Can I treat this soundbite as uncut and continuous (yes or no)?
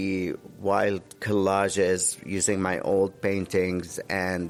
yes